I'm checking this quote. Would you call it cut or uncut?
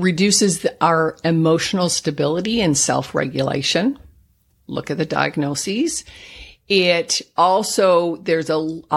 uncut